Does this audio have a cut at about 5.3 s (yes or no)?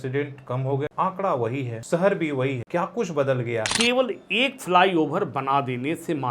no